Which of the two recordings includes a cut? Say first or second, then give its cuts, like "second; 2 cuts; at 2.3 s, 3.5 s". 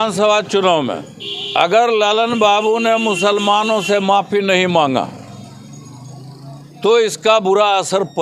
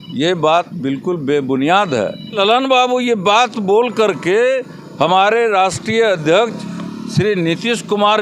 second; 1 cut; at 2.3 s